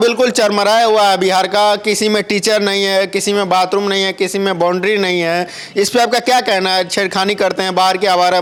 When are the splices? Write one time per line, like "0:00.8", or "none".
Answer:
none